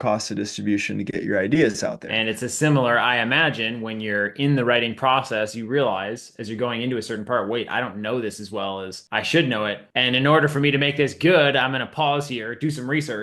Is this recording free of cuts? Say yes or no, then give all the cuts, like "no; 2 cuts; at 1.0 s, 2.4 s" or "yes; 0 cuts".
no; 3 cuts; at 2.1 s, 9.0 s, 9.9 s